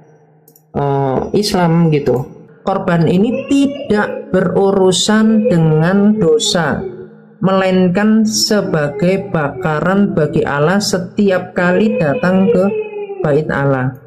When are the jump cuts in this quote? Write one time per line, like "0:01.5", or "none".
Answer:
0:02.4